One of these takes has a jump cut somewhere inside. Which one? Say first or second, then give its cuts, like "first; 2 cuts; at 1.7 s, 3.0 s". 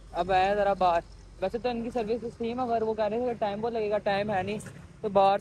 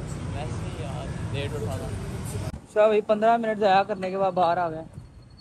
second; 1 cut; at 2.6 s